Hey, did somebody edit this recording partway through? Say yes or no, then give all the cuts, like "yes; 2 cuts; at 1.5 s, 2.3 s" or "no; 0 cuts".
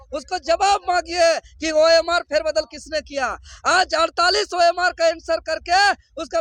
no; 0 cuts